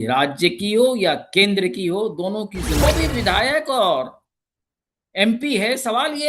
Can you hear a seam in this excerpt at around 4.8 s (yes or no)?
no